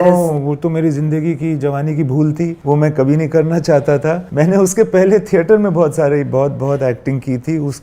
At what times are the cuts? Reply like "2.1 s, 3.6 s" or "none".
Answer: 2.6 s, 4.2 s